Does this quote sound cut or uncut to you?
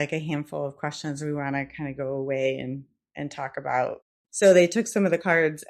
cut